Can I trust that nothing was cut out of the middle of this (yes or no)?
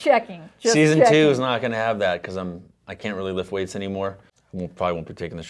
no